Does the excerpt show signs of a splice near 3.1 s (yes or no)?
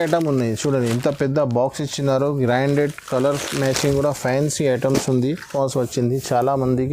no